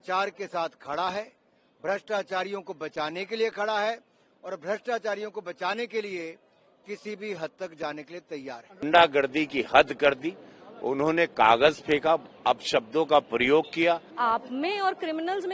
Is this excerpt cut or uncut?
cut